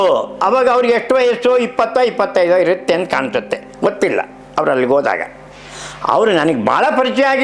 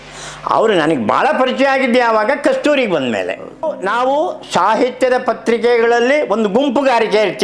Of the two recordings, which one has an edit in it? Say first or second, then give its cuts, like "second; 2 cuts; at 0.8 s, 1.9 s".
second; 1 cut; at 3.7 s